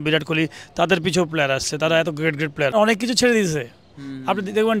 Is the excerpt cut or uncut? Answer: cut